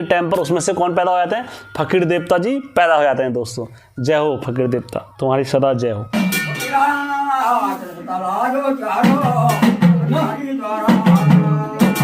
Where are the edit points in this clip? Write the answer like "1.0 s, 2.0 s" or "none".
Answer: none